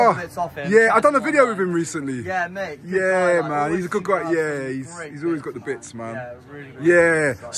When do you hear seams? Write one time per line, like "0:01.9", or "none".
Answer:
none